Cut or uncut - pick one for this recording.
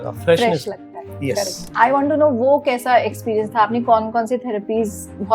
cut